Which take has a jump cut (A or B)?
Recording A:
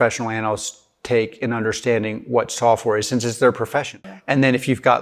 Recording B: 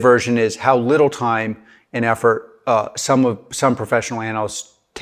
A